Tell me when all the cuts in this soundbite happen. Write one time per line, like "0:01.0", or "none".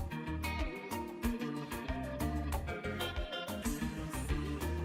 0:03.5